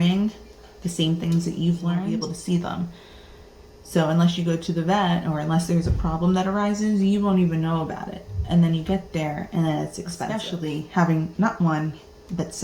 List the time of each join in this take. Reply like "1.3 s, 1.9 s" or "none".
2.3 s, 10.4 s